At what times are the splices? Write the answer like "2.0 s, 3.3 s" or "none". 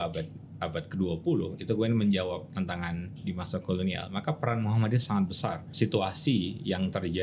5.7 s